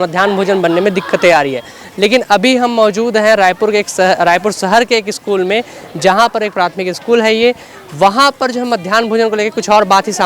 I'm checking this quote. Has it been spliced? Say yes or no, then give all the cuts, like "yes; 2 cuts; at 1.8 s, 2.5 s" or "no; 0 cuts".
no; 0 cuts